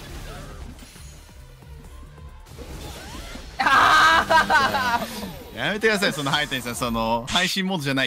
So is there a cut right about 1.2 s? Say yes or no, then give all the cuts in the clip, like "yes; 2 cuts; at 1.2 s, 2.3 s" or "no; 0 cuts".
no; 0 cuts